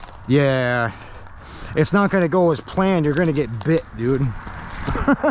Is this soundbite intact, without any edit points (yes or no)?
yes